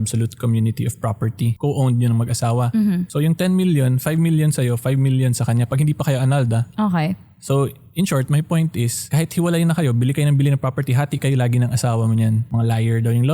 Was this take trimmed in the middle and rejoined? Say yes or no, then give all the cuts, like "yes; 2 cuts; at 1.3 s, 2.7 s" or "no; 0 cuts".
yes; 3 cuts; at 1.5 s, 3.1 s, 12.4 s